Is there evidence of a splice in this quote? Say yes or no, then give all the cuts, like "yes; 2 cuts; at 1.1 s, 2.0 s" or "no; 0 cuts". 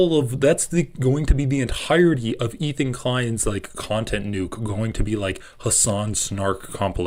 no; 0 cuts